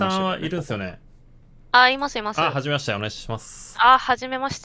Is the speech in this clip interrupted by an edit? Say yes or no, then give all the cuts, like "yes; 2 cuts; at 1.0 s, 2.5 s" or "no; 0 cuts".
no; 0 cuts